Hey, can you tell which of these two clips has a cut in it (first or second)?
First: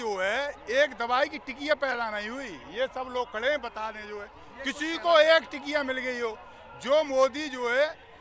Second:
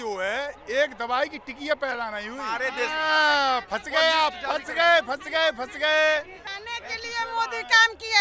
second